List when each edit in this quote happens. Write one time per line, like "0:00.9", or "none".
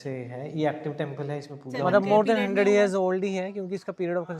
0:01.8